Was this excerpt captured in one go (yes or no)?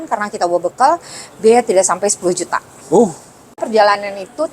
no